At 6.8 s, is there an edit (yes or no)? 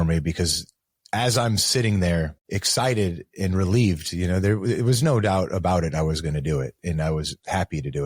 no